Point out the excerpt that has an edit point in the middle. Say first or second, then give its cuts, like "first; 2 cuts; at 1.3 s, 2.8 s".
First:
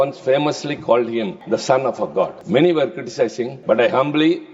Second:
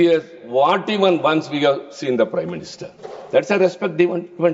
first; 3 cuts; at 1.4 s, 2.4 s, 3.5 s